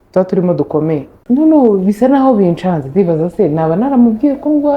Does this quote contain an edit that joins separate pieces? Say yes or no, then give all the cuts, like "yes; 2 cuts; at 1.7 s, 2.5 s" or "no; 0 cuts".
yes; 1 cut; at 1.1 s